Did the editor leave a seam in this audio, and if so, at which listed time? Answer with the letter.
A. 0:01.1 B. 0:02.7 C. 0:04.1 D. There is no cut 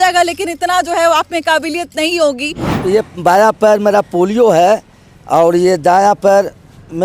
B